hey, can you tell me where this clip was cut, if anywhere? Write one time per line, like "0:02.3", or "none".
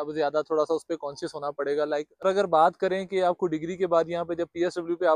0:02.1